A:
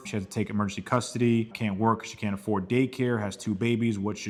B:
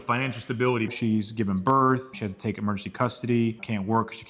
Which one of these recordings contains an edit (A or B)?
B